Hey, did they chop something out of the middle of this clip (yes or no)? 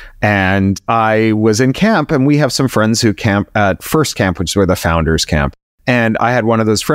yes